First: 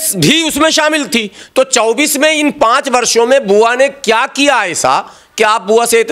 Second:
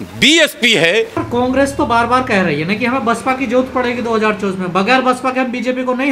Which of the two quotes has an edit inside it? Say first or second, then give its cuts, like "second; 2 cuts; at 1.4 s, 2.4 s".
second; 1 cut; at 1.2 s